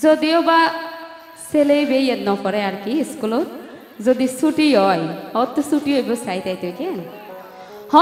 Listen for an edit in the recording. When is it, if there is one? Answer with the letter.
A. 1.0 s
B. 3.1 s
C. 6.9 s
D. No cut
D